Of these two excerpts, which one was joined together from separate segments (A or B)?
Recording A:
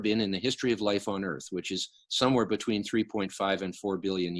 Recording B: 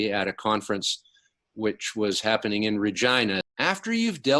B